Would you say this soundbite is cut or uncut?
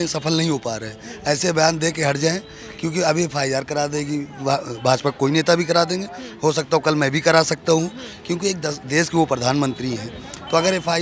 uncut